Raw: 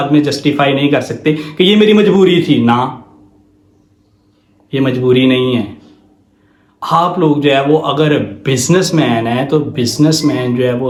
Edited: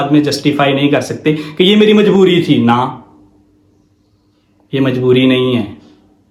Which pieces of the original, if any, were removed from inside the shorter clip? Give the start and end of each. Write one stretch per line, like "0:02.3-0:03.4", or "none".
none